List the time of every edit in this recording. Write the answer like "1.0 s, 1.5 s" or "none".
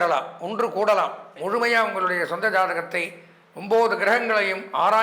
1.4 s